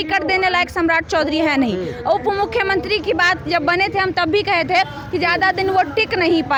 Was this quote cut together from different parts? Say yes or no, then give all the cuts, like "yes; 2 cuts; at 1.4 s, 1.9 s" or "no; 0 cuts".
no; 0 cuts